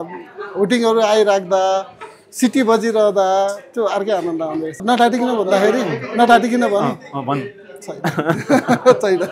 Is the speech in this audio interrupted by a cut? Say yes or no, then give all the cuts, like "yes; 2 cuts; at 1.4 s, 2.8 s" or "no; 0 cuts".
yes; 1 cut; at 4.8 s